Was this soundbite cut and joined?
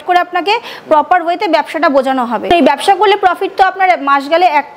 yes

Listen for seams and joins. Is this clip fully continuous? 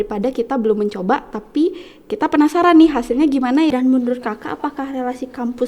no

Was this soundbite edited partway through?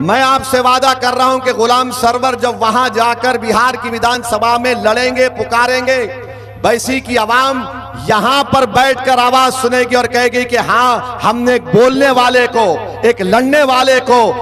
no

